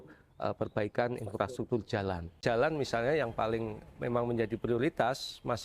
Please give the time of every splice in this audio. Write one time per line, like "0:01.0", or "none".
0:02.4